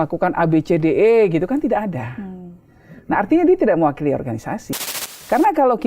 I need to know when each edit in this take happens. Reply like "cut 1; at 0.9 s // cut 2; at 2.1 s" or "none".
cut 1; at 4.7 s

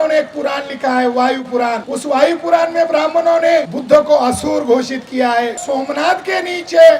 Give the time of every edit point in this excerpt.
cut 1; at 1.9 s // cut 2; at 3.8 s // cut 3; at 5.6 s

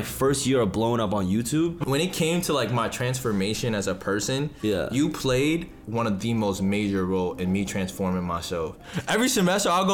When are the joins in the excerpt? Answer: cut 1; at 1.8 s // cut 2; at 5.8 s // cut 3; at 8.9 s

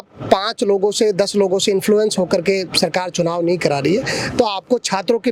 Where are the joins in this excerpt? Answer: none

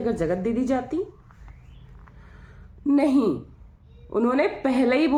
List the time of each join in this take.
none

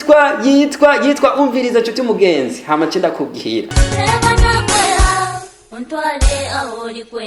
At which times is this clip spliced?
none

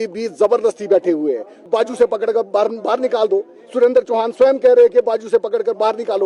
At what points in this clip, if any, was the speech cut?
cut 1; at 1.6 s

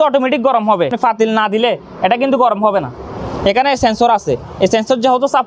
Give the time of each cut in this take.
cut 1; at 0.9 s

